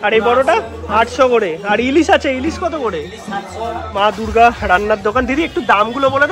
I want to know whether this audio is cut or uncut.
cut